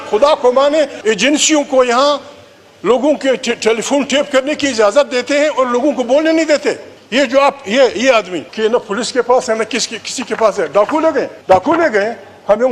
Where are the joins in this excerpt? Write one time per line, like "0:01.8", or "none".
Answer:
0:01.0
0:06.9
0:08.4
0:11.3